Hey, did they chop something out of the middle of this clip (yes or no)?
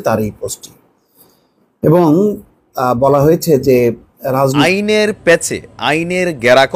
yes